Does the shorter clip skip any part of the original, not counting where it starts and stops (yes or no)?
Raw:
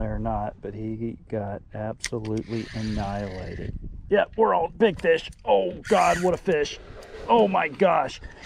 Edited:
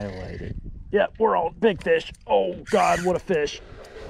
no